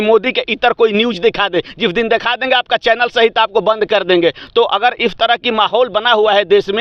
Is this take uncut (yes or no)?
yes